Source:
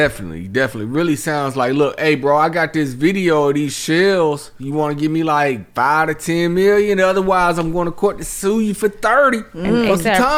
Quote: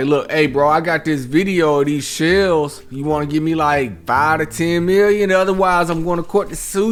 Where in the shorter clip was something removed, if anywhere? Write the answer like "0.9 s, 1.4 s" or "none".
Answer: none